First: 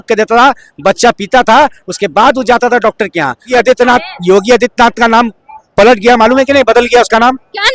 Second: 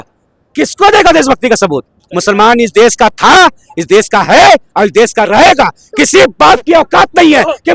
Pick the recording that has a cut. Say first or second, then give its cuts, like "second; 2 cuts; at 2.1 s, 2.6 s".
first; 1 cut; at 3.5 s